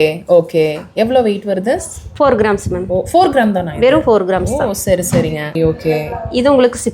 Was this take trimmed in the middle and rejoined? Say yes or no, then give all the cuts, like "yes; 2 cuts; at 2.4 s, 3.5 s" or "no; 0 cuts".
yes; 1 cut; at 5.5 s